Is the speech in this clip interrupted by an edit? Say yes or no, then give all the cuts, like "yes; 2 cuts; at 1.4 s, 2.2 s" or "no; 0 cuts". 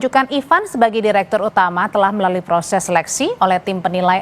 no; 0 cuts